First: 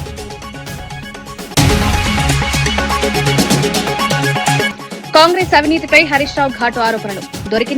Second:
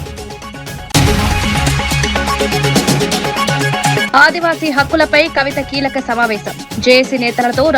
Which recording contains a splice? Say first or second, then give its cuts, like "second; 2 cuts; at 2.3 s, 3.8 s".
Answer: second; 3 cuts; at 0.9 s, 2.2 s, 3.6 s